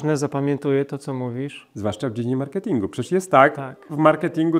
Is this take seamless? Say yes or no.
yes